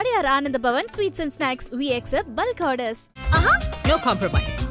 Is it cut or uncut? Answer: uncut